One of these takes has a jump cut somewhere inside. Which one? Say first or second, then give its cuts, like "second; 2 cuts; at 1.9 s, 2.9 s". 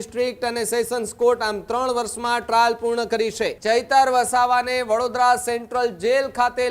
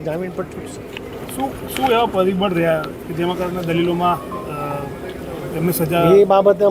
first; 1 cut; at 3.6 s